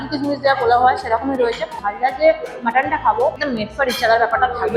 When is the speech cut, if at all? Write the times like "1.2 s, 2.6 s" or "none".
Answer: 1.8 s, 3.4 s